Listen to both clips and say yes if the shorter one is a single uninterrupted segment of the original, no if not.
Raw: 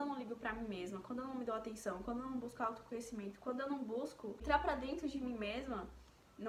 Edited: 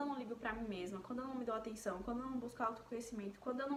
yes